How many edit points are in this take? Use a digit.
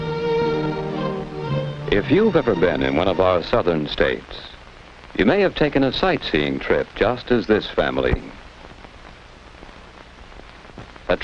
1